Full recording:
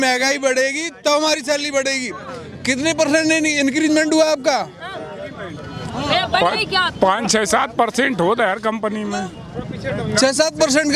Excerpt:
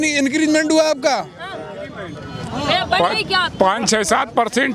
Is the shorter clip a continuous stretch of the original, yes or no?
yes